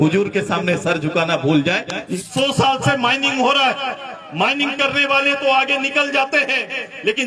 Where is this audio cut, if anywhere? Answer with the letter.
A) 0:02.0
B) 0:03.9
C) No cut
A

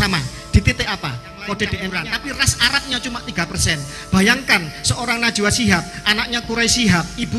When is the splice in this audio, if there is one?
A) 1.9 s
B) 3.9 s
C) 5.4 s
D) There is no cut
A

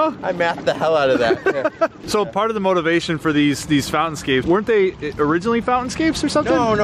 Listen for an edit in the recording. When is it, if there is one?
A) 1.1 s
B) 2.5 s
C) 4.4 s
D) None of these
C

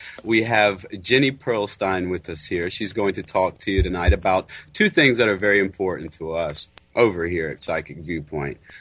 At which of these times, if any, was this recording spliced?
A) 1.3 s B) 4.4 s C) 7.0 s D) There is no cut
D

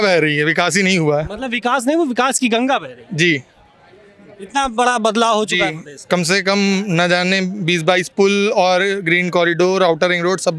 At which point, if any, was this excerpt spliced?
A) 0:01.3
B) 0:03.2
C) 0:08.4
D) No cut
D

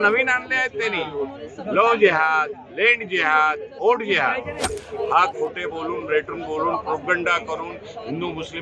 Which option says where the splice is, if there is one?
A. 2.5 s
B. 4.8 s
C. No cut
B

